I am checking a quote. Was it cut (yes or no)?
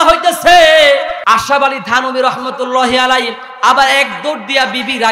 yes